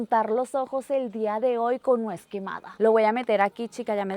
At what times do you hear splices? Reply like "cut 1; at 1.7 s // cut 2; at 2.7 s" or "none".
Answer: cut 1; at 2.7 s